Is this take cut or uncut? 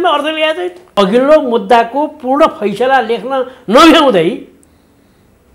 cut